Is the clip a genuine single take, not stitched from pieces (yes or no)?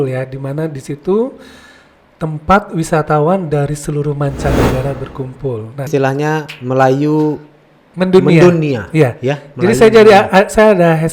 no